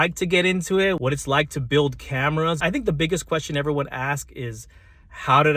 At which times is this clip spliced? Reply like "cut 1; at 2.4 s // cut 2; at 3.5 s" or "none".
cut 1; at 1.0 s // cut 2; at 2.6 s